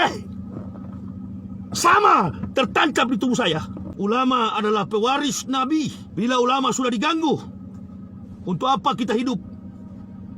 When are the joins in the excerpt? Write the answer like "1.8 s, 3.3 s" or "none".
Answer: 3.8 s, 6.0 s